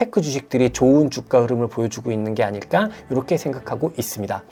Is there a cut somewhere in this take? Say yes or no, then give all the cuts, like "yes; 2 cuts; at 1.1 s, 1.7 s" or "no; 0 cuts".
no; 0 cuts